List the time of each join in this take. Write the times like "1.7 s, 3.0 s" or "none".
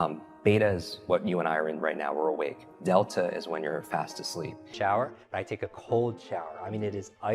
4.7 s